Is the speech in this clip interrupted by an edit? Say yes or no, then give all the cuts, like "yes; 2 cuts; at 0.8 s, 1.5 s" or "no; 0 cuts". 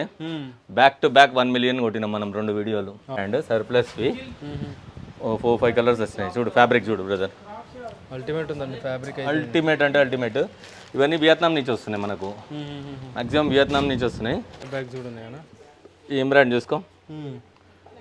yes; 2 cuts; at 3.2 s, 14.7 s